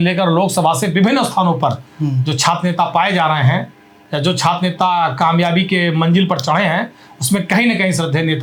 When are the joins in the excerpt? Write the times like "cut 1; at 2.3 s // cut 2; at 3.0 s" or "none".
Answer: none